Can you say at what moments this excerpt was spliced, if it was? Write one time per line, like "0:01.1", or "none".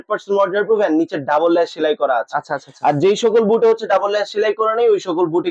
none